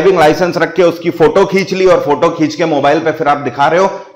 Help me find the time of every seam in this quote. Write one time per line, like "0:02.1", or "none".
none